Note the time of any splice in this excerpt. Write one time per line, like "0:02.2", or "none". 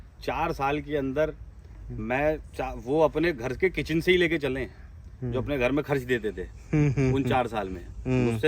none